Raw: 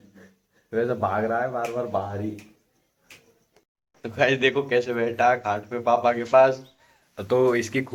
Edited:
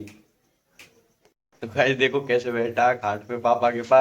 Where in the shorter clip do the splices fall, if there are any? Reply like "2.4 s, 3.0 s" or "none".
1.4 s